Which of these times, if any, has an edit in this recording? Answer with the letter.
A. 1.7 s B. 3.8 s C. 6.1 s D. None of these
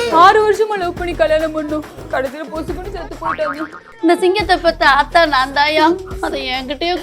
B